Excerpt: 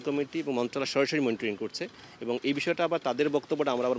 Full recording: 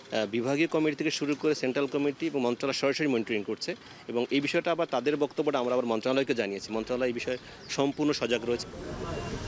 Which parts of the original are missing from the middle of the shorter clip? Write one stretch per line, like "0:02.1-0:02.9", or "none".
none

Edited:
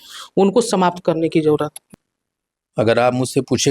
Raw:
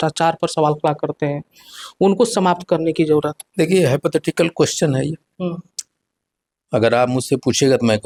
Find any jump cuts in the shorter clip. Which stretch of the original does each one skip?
0:03.4-0:05.7

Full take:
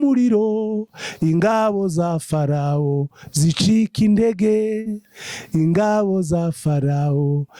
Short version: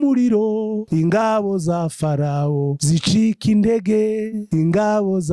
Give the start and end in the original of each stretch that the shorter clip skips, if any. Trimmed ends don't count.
0:00.8-0:01.1
0:03.1-0:03.3
0:04.9-0:05.4

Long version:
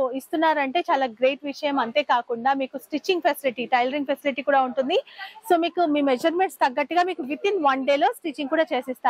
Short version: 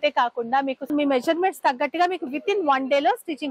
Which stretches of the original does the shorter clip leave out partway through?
0:02.8-0:05.9

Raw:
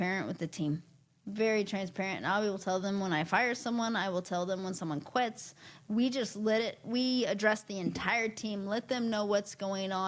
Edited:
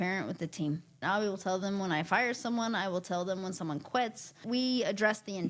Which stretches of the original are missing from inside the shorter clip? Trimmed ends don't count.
0:01.0-0:02.2
0:05.6-0:06.8

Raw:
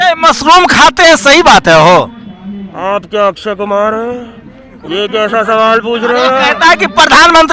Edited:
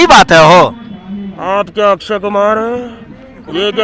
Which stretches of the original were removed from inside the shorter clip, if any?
none

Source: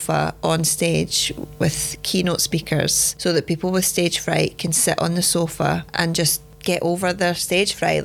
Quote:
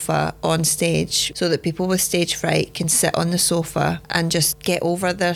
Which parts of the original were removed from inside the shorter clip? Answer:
0:01.2-0:03.1
0:06.4-0:06.5

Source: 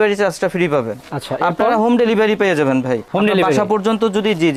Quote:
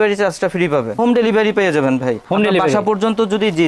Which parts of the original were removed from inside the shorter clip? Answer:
0:01.0-0:01.8

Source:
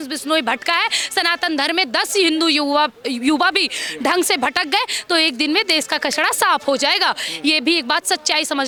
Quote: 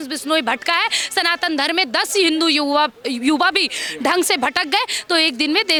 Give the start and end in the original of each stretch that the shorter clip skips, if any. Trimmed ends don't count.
none

